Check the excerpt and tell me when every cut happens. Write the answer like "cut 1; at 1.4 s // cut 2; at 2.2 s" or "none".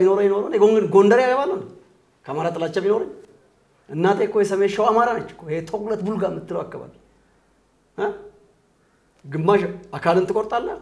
none